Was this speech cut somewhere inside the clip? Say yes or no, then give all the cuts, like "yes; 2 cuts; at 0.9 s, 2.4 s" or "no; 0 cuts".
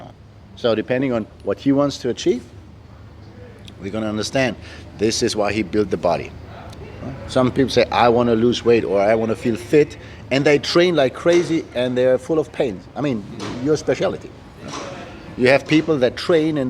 yes; 1 cut; at 6.4 s